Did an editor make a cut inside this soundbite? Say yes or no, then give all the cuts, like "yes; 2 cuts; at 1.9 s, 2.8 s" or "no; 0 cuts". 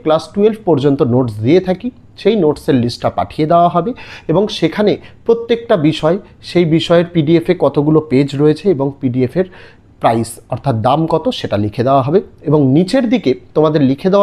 no; 0 cuts